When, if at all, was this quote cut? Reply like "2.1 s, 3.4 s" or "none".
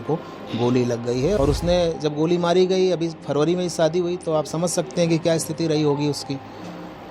1.4 s